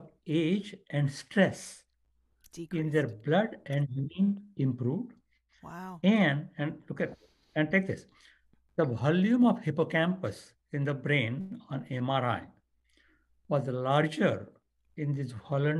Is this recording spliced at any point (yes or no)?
no